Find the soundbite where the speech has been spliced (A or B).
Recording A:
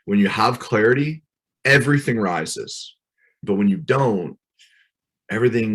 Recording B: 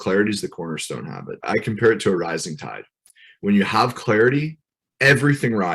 B